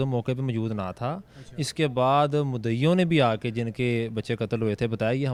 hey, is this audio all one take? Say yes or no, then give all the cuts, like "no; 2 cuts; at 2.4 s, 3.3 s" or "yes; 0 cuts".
yes; 0 cuts